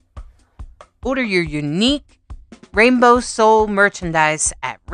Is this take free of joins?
no; 1 cut; at 1.0 s

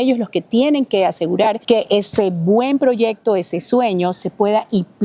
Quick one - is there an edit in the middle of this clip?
yes; 1 cut; at 1.6 s

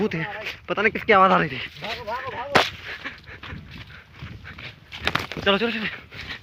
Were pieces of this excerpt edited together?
no; 0 cuts

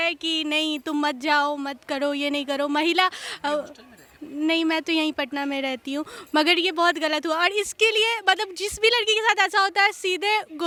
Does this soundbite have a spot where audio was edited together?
no; 0 cuts

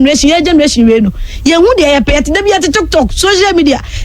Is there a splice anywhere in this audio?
no; 0 cuts

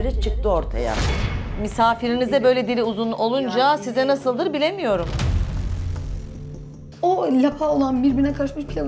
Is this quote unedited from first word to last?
no; 1 cut; at 6.8 s

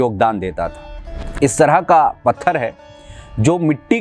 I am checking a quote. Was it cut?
yes; 1 cut; at 1.3 s

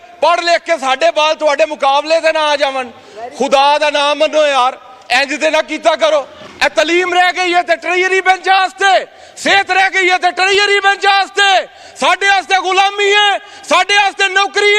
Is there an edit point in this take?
yes; 1 cut; at 6.4 s

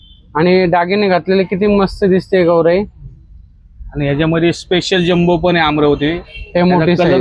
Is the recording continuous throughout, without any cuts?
yes; 0 cuts

